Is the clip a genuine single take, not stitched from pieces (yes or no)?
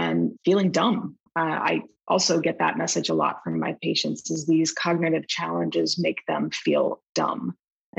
no